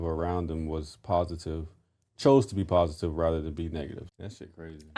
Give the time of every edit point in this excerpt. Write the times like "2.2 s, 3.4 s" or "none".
4.0 s